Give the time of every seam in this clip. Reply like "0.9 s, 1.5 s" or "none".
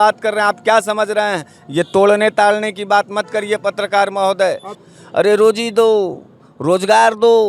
4.7 s

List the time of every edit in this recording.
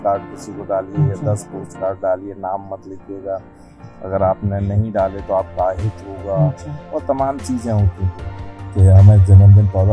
8.6 s

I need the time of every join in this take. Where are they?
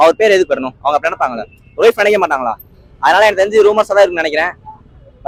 none

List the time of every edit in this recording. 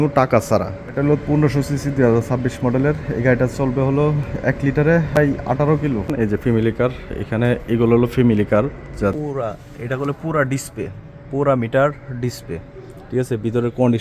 1.0 s, 5.2 s, 6.1 s, 9.1 s

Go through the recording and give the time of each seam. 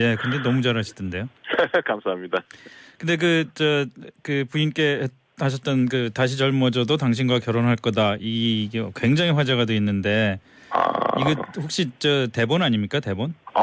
1.4 s

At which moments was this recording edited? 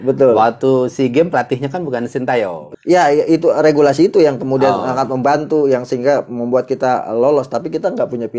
2.6 s

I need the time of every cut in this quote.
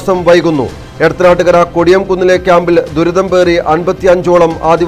none

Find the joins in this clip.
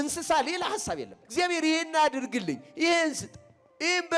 1.2 s

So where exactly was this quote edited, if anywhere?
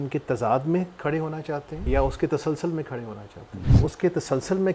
1.7 s, 3.7 s

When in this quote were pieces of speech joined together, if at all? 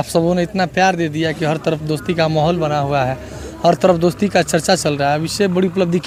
none

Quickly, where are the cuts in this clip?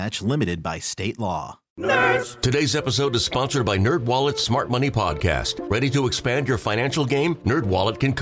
1.6 s

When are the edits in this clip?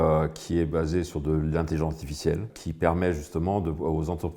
2.6 s

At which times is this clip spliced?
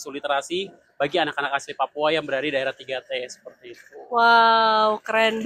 none

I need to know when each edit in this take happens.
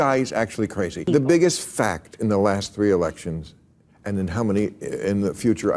1.0 s

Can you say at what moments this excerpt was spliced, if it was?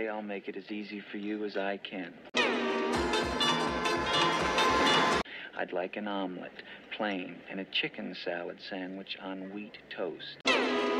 none

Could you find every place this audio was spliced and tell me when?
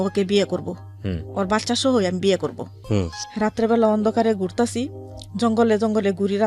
2.7 s

